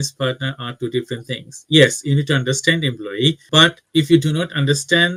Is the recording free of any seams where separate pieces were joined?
yes; 0 cuts

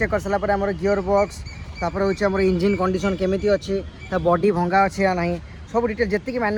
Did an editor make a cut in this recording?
no; 0 cuts

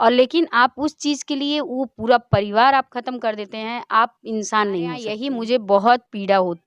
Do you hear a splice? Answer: yes; 1 cut; at 5.2 s

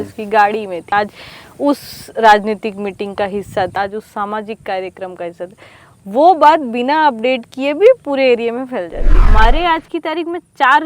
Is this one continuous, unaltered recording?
no; 3 cuts; at 0.9 s, 3.8 s, 9.2 s

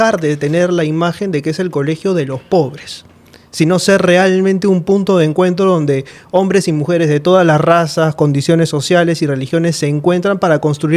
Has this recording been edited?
no; 0 cuts

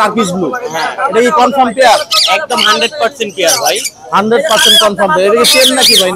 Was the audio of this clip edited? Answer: no; 0 cuts

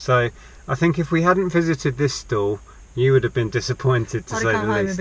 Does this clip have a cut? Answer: no; 0 cuts

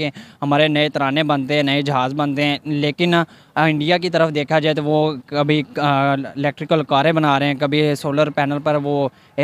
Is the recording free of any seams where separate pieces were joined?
yes; 0 cuts

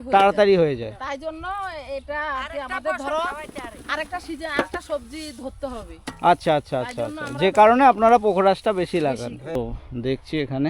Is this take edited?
yes; 1 cut; at 9.6 s

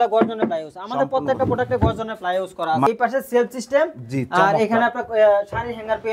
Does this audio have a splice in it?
yes; 1 cut; at 2.9 s

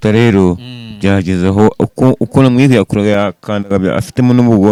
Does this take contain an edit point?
no; 0 cuts

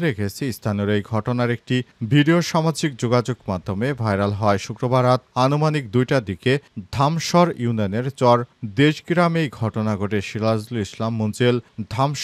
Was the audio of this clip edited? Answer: no; 0 cuts

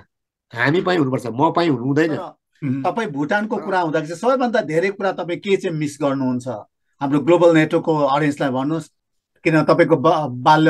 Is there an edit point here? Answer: yes; 2 cuts; at 2.9 s, 9.0 s

